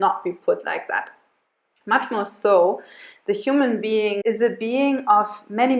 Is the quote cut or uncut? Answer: cut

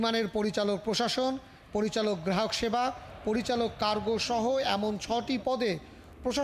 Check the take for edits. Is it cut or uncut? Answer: uncut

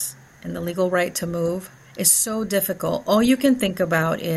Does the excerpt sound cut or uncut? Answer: cut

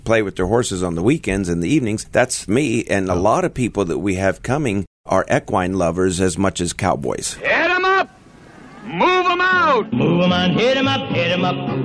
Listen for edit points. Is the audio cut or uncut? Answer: cut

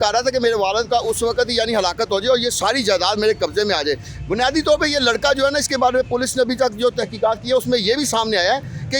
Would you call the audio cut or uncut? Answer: uncut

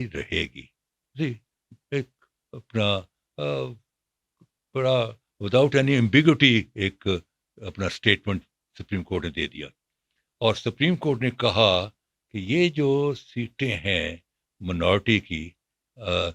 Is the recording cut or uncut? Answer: uncut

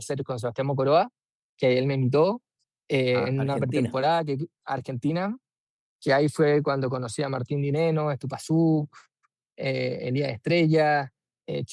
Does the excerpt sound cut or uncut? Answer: uncut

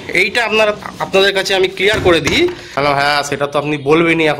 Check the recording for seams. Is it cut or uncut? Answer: cut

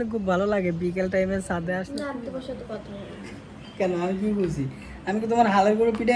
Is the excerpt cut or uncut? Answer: cut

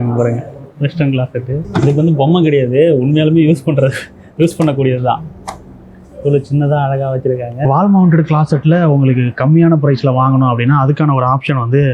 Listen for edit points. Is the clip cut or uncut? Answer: cut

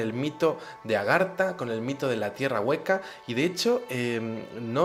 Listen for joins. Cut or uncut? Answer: uncut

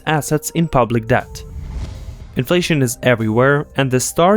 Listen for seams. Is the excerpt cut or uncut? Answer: cut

